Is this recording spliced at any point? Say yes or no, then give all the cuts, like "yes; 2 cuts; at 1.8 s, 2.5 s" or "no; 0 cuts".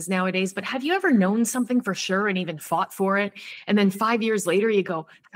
no; 0 cuts